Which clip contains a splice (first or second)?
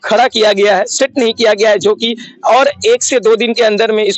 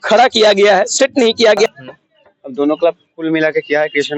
second